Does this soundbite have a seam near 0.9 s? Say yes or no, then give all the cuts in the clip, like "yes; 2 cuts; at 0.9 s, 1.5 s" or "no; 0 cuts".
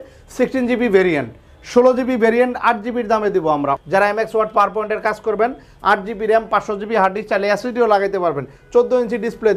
no; 1 cut; at 3.8 s